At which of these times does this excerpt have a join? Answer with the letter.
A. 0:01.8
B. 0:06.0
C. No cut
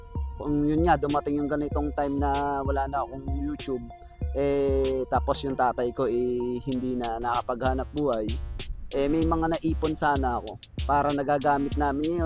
C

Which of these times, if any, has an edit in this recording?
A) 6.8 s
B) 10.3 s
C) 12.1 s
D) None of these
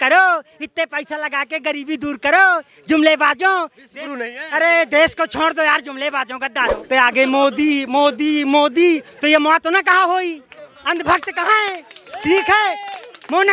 A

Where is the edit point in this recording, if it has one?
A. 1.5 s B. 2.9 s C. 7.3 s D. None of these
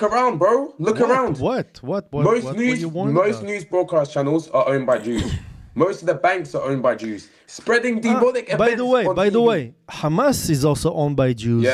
D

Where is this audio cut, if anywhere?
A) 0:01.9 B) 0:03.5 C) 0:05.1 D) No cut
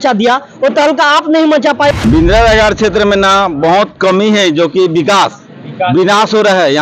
A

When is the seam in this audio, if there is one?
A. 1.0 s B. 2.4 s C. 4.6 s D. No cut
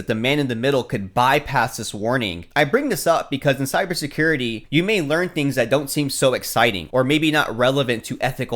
B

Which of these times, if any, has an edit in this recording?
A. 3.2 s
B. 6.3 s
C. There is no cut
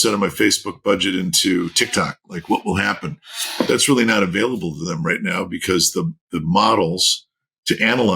C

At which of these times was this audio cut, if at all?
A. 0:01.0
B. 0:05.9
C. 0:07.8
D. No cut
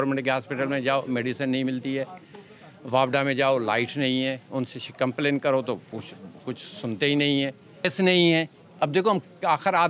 D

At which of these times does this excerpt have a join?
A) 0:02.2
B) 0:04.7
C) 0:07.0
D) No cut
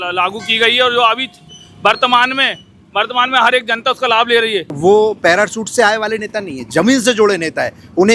B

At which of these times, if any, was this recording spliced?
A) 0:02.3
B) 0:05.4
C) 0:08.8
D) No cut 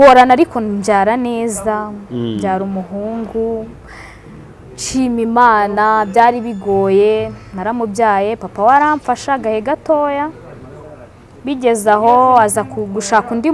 D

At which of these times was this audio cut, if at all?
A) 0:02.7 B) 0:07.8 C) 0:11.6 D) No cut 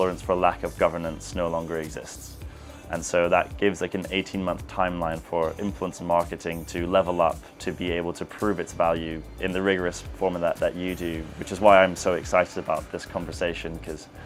D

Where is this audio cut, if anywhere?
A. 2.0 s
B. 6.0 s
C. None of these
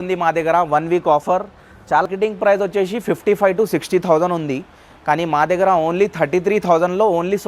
A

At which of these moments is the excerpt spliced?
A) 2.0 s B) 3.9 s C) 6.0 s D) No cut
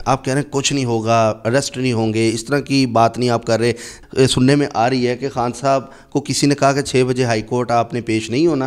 B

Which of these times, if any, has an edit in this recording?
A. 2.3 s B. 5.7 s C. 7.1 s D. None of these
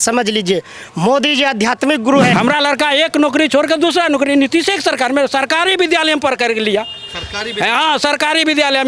A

